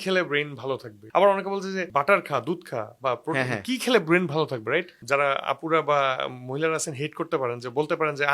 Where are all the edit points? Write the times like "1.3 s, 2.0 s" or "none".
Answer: 0.9 s, 1.9 s, 5.0 s